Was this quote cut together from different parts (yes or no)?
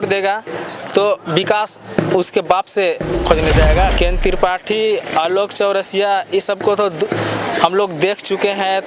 yes